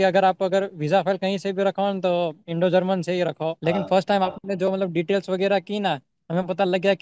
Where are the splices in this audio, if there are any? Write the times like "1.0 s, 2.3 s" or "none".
3.6 s